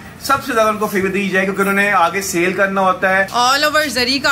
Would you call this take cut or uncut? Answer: cut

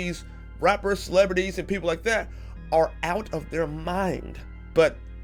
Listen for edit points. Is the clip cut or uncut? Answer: uncut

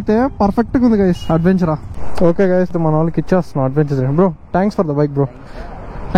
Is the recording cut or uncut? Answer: uncut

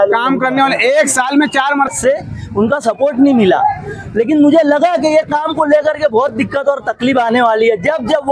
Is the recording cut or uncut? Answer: cut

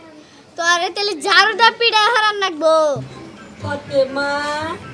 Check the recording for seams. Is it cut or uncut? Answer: cut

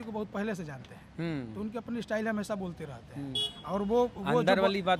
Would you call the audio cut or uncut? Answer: uncut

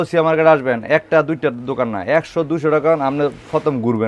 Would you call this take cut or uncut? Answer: uncut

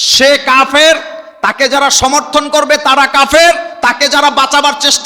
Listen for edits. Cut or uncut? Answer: uncut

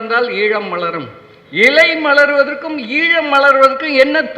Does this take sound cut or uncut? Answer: uncut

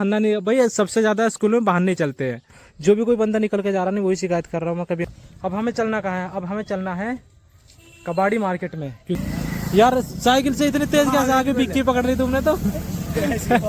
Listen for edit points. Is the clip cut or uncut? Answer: cut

